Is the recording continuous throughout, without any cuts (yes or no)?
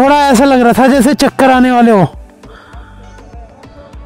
yes